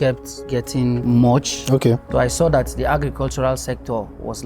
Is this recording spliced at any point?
yes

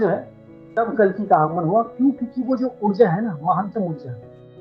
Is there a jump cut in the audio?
no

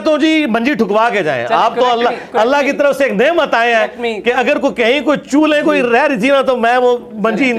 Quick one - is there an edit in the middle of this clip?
no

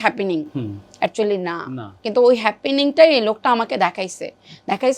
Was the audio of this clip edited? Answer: yes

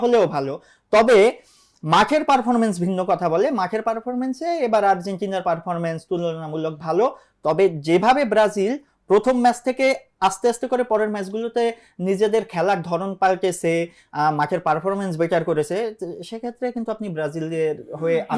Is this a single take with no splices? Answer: yes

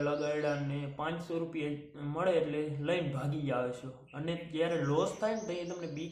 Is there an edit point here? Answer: no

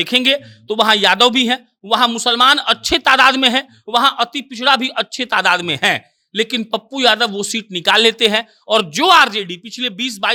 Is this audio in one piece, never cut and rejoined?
yes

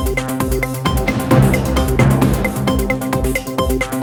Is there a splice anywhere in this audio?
no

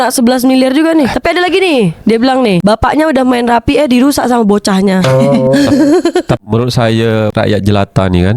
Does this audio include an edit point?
yes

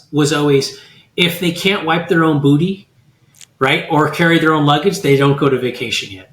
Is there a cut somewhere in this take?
no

